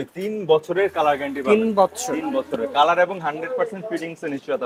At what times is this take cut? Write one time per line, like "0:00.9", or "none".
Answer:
none